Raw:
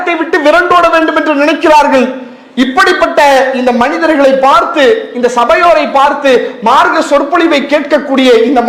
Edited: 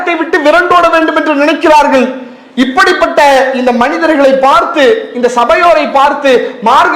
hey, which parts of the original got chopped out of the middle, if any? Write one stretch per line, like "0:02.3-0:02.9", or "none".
none